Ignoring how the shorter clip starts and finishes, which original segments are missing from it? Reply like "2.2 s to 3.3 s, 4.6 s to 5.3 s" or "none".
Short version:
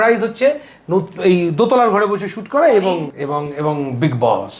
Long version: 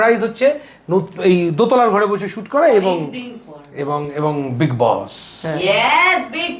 3.1 s to 3.7 s

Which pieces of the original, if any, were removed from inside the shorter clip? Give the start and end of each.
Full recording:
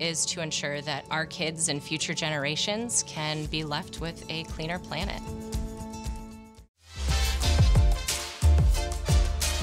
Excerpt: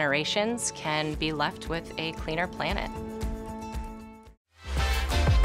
none

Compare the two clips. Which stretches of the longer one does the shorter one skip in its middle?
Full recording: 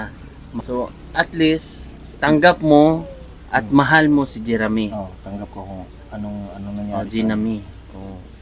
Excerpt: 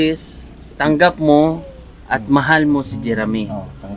none

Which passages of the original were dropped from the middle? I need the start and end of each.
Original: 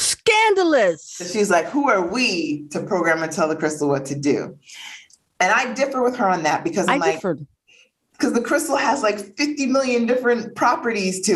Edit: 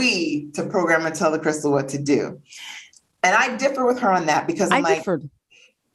none

